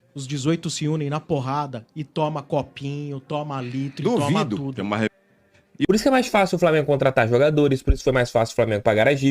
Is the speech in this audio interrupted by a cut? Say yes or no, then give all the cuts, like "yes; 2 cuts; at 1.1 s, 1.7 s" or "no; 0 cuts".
yes; 1 cut; at 5.9 s